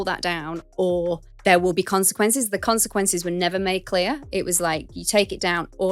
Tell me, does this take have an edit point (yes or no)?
no